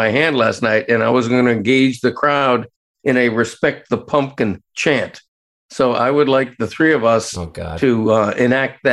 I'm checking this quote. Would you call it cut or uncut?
uncut